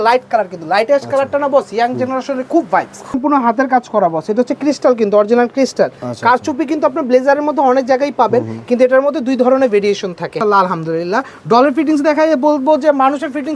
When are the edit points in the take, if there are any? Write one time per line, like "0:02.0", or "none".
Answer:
0:03.2
0:10.4